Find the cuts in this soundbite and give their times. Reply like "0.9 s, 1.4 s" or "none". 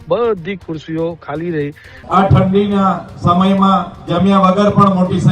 1.9 s